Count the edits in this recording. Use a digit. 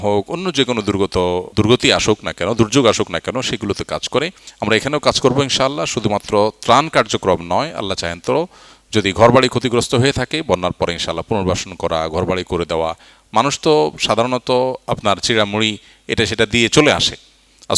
2